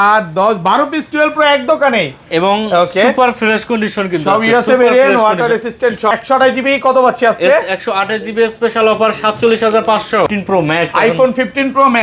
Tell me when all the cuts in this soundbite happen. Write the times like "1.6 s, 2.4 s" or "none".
6.1 s, 10.3 s